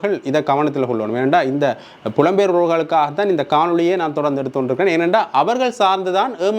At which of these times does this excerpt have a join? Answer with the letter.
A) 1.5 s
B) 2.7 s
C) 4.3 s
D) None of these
D